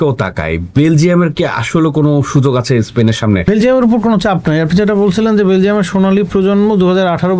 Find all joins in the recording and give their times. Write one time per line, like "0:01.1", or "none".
0:03.5

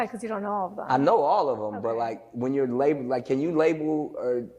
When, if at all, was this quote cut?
0:01.3
0:03.0

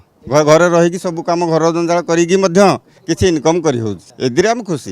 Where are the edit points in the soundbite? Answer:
0:02.9
0:04.0

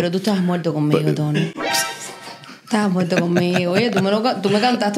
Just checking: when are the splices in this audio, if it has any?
none

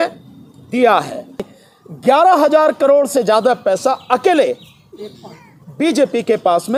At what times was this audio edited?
0:01.5

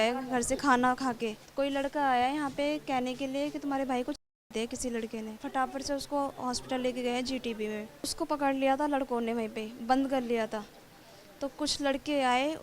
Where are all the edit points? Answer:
0:01.4
0:04.3
0:05.4
0:08.1

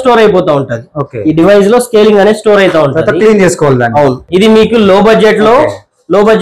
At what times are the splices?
0:04.2

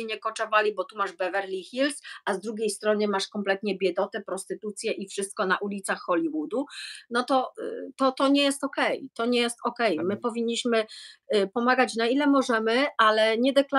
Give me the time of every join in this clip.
none

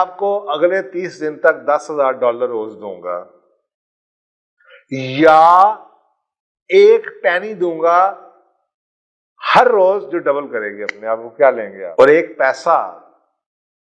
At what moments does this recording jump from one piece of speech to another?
0:11.8

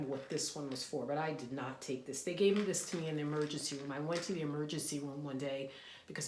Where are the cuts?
none

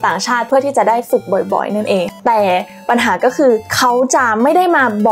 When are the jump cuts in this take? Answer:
0:02.1

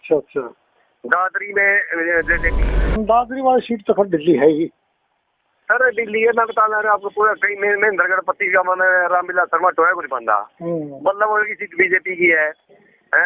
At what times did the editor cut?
0:03.0

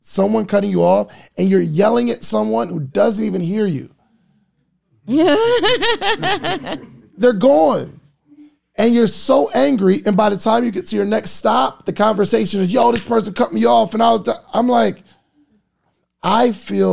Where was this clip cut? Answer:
none

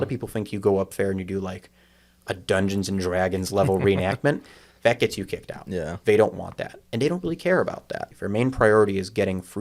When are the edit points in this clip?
0:08.0

